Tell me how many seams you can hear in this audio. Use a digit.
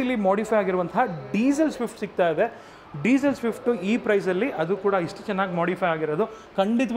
0